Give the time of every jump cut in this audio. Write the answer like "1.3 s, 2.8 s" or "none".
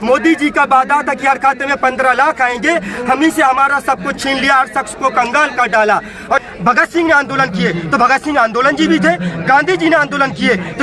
6.4 s